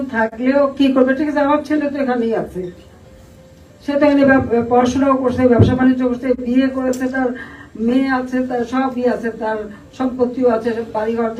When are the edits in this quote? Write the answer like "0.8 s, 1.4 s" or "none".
none